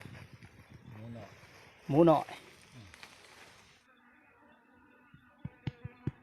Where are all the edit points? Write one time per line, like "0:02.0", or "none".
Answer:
0:03.8